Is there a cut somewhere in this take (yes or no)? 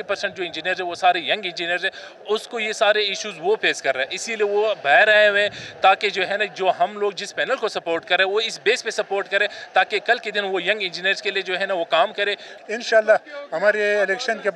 yes